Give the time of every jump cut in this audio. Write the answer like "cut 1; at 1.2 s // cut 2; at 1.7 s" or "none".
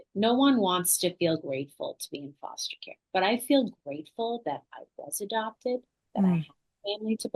none